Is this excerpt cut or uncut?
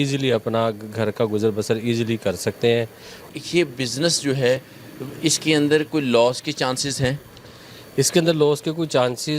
cut